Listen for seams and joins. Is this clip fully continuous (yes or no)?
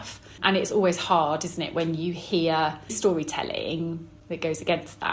no